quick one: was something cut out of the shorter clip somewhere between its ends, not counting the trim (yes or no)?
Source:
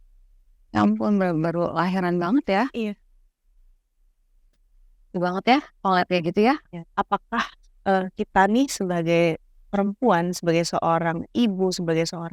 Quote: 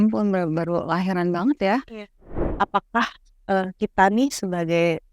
yes